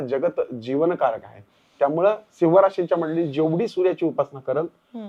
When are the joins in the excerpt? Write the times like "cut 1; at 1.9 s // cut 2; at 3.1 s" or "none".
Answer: none